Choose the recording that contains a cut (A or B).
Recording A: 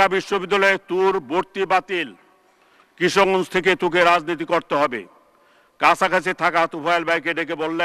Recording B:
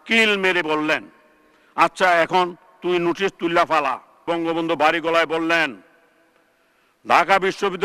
B